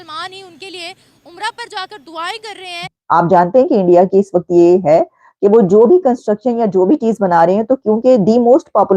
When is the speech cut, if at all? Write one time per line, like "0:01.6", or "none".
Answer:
0:02.9